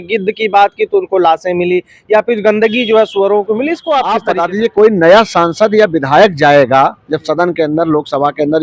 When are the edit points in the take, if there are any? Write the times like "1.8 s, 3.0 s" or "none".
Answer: 4.3 s